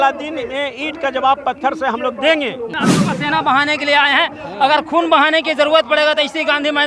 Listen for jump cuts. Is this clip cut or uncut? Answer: cut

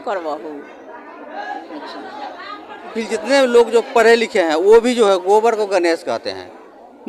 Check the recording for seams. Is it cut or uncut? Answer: cut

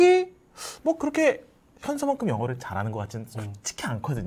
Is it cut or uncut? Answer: uncut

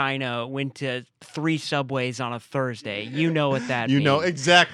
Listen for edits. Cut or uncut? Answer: uncut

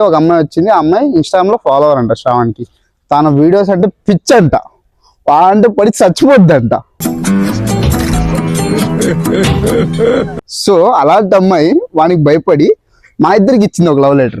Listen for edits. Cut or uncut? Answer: uncut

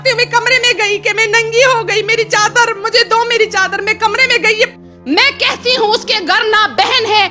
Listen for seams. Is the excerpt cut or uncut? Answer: cut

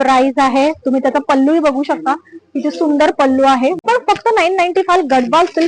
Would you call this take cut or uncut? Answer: cut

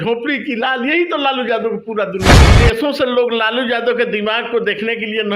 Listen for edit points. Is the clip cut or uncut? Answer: cut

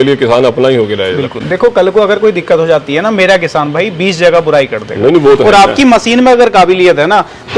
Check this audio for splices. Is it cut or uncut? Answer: uncut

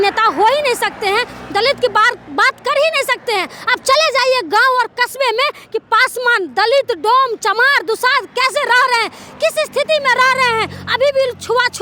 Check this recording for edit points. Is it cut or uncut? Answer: uncut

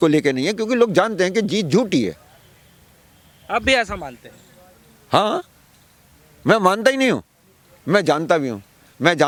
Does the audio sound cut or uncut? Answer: uncut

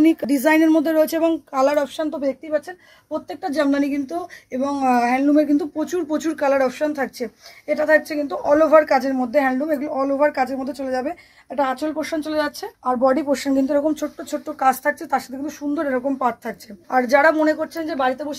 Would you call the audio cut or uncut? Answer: uncut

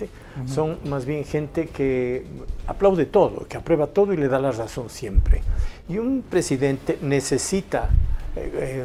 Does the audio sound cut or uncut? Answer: uncut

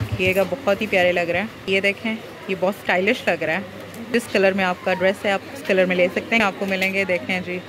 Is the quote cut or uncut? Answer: cut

